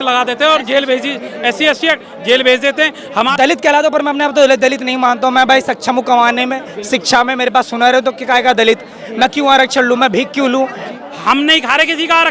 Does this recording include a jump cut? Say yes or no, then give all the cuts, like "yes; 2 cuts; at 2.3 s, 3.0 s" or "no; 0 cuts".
yes; 2 cuts; at 3.2 s, 10.9 s